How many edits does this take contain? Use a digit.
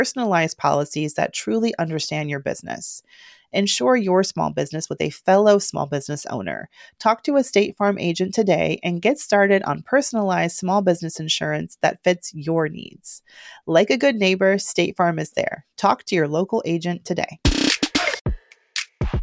1